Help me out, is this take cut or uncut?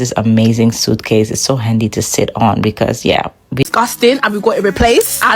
cut